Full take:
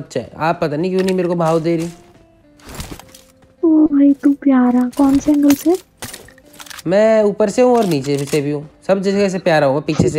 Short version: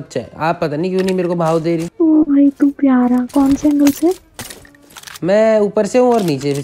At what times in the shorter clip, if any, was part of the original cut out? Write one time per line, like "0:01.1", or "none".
0:01.9